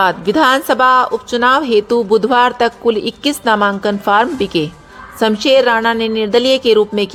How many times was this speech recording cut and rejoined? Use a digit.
0